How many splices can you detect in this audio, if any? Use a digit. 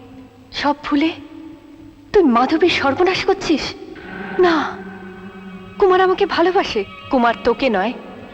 0